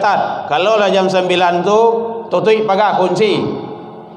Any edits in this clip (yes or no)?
no